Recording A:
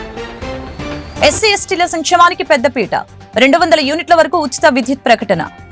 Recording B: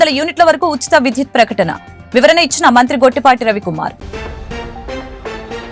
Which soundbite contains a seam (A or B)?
A